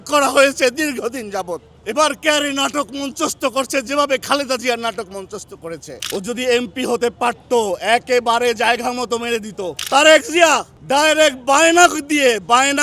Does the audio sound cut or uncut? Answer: cut